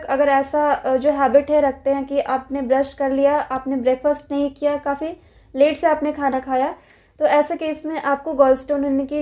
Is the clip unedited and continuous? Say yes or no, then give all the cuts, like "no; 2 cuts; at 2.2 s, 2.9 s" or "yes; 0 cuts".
yes; 0 cuts